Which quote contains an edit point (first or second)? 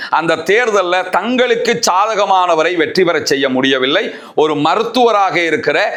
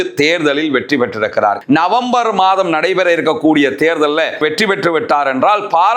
second